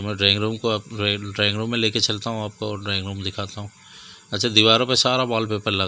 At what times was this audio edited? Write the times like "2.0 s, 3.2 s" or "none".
none